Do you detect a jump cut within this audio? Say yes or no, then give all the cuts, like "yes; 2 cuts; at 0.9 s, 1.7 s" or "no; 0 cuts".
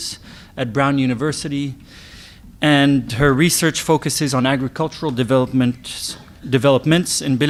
no; 0 cuts